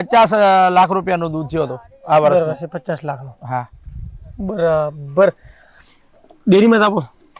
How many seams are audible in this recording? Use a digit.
0